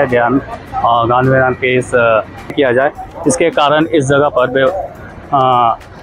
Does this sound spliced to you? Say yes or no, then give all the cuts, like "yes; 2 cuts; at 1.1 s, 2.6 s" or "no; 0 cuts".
yes; 1 cut; at 2.5 s